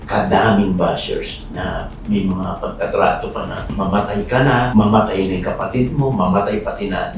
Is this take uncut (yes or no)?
yes